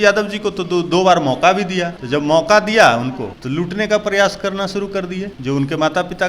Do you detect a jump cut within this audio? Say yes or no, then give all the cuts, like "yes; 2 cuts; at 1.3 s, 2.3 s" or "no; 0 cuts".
yes; 3 cuts; at 1.9 s, 3.3 s, 5.3 s